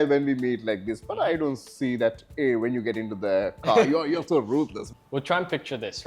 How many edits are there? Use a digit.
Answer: 1